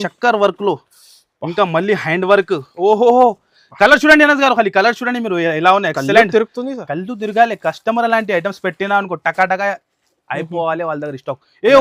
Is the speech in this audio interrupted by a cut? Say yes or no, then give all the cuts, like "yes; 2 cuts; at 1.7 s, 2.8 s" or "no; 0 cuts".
no; 0 cuts